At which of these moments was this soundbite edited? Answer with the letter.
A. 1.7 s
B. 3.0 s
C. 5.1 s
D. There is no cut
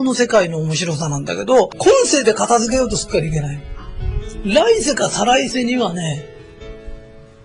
A